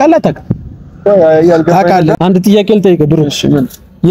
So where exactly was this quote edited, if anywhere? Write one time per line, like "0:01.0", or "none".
0:02.2